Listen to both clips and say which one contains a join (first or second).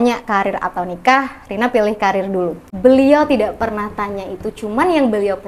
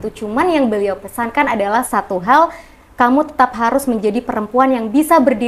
first